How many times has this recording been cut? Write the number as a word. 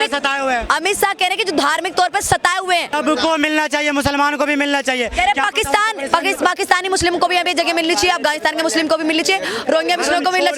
one